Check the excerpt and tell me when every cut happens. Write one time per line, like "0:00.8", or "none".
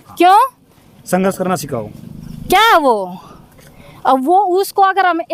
none